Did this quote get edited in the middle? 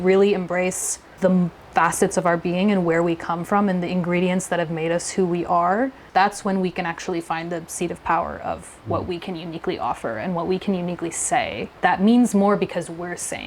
yes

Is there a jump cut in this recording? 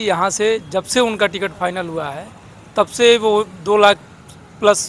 no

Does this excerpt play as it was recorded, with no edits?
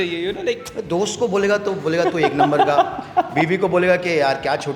yes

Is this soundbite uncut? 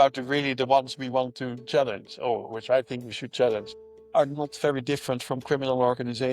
no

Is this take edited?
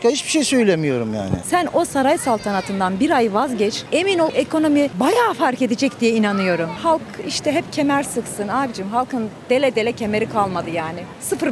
yes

